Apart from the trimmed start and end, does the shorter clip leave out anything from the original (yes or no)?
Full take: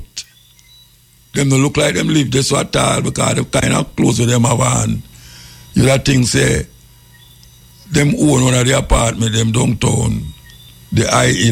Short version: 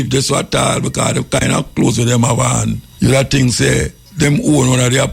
yes